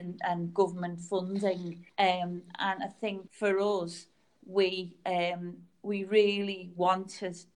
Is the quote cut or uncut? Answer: cut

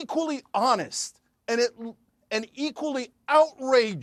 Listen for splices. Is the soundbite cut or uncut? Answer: uncut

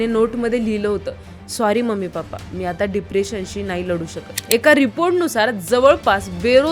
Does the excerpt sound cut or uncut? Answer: cut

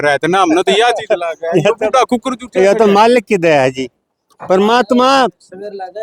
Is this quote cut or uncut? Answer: uncut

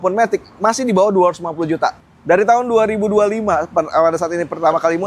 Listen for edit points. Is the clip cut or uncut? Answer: cut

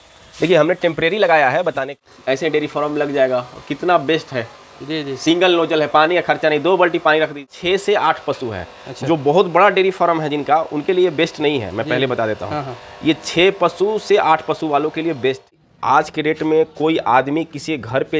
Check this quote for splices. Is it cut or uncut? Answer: cut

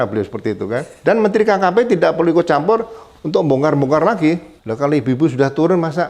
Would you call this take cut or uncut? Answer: cut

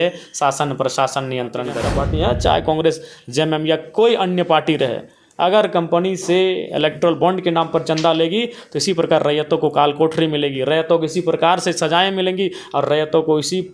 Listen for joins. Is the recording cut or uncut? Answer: cut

